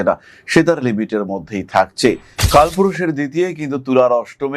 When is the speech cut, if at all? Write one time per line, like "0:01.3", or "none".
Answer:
0:02.3